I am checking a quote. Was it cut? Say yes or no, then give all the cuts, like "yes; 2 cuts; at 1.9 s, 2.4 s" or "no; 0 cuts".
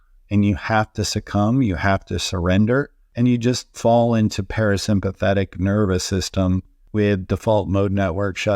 yes; 2 cuts; at 3.0 s, 6.8 s